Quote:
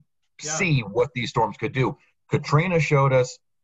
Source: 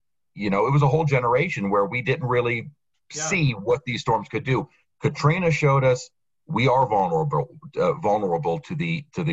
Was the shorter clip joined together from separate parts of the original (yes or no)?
no